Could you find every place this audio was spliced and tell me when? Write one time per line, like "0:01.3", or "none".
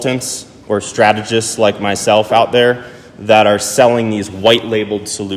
none